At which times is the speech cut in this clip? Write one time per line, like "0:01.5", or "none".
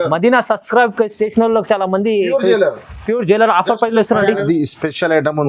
0:04.5

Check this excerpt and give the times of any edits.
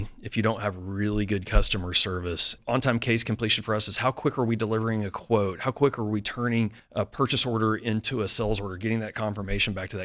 0:02.5
0:06.8

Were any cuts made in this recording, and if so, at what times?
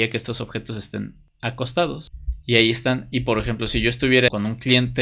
0:01.2
0:02.2
0:04.3

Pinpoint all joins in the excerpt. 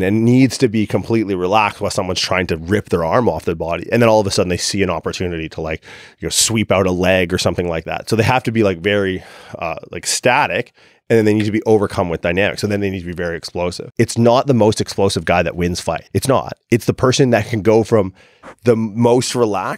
0:13.8
0:16.0

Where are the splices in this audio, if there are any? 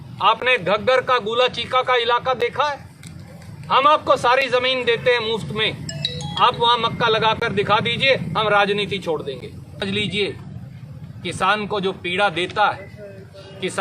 0:09.8

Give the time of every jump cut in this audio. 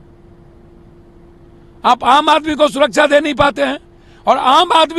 none

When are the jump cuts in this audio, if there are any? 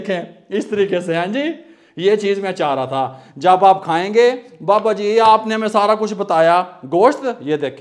none

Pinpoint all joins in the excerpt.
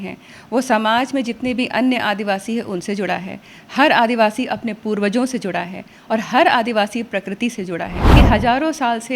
0:08.1

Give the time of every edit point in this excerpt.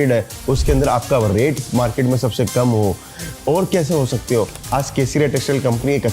0:04.6

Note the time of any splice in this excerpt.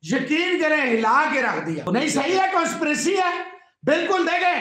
0:01.9

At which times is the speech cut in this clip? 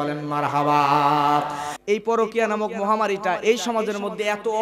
0:01.7

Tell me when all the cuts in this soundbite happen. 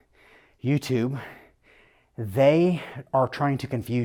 none

